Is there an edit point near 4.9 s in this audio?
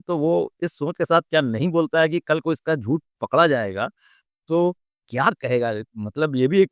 no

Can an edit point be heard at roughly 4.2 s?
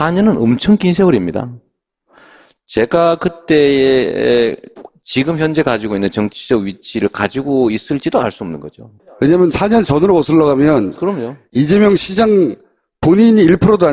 yes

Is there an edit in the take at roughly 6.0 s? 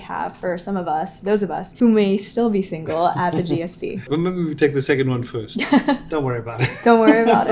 no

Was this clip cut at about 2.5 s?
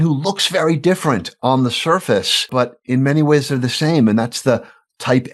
yes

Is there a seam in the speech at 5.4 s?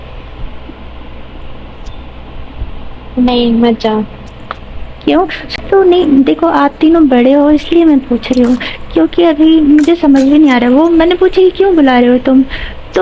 yes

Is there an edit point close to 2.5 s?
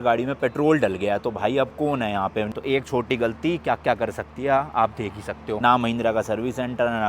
yes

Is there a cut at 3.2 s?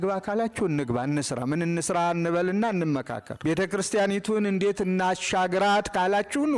yes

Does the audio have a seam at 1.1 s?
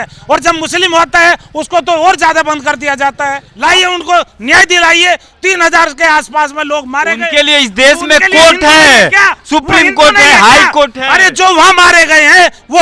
no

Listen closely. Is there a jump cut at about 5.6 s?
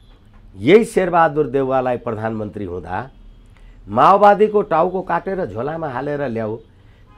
no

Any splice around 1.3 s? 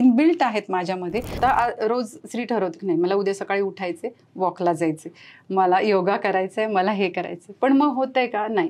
yes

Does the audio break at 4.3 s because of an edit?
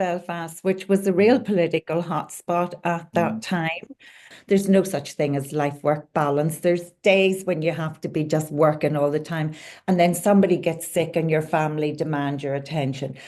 yes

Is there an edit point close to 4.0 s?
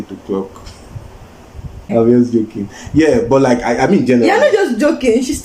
no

